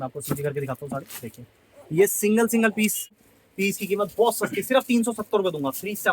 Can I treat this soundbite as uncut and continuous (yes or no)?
no